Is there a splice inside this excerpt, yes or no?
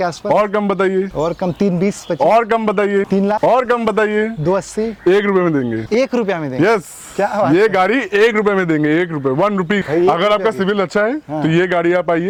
no